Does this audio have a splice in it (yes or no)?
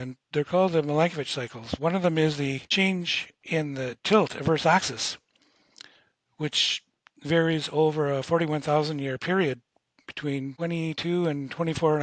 yes